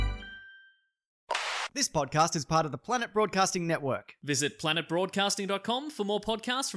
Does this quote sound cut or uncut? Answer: cut